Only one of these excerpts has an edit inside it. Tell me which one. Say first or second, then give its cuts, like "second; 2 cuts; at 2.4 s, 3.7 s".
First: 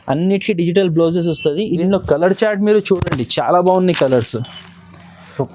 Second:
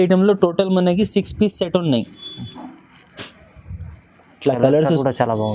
first; 1 cut; at 1.8 s